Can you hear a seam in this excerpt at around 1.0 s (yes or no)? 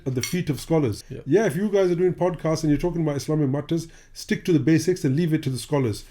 yes